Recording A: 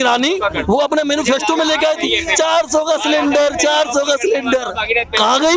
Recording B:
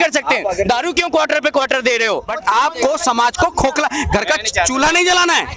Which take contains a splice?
B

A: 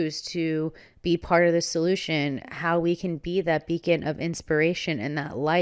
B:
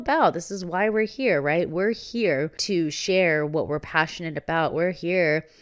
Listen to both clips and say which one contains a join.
B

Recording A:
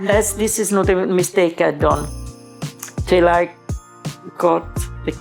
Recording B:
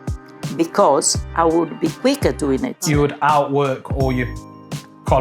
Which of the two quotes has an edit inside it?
B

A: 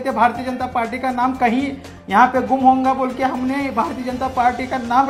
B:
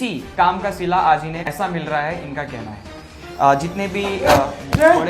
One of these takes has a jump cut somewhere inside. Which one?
B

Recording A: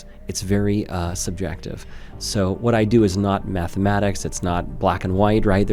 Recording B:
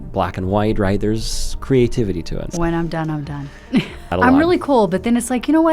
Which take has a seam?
B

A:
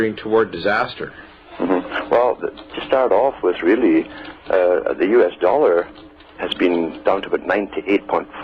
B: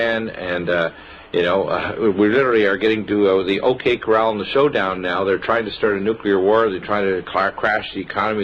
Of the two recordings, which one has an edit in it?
B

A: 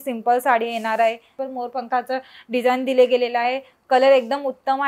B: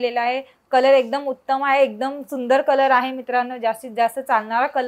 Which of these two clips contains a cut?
A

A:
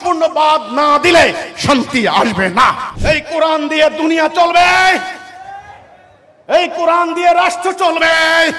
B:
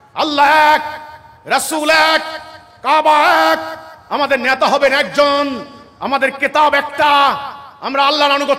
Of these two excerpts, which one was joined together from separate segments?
A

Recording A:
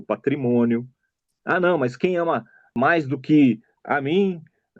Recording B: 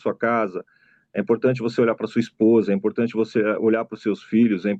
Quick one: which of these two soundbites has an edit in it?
A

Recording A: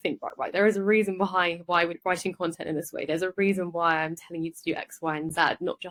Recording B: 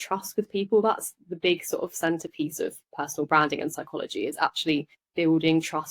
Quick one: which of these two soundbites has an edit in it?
B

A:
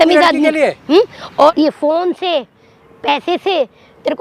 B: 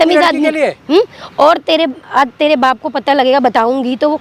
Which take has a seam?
A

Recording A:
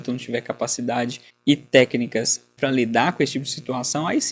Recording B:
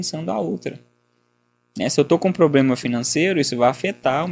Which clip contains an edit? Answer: A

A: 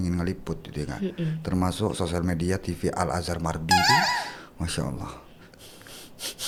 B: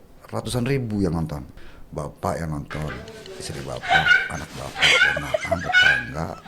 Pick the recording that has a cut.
B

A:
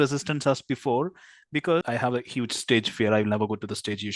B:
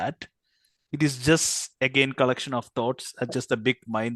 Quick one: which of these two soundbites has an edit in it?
A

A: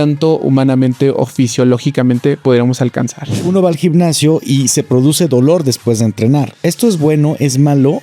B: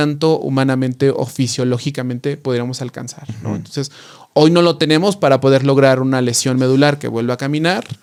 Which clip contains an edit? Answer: A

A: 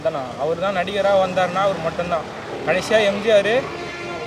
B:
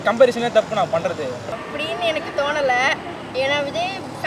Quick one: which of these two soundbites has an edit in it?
B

